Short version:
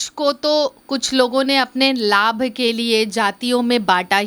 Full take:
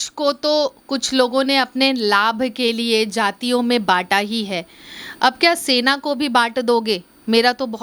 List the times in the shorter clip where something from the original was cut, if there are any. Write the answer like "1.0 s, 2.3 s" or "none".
none